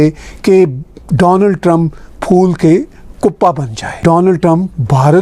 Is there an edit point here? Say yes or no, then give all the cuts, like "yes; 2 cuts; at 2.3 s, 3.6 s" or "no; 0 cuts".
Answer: yes; 1 cut; at 4.0 s